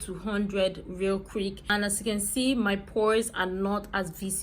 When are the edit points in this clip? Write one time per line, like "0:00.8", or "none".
0:01.8